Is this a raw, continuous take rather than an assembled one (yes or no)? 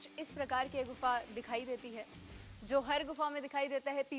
yes